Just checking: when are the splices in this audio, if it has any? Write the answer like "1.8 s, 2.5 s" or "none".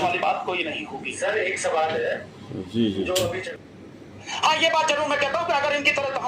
3.4 s